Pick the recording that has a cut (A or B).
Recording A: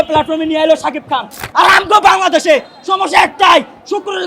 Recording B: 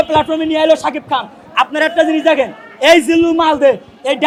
A